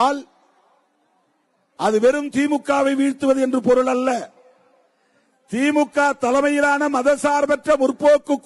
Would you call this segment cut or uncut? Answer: uncut